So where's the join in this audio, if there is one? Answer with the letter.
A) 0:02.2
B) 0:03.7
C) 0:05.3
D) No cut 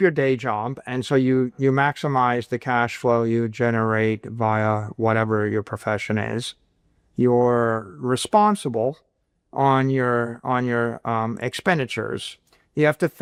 D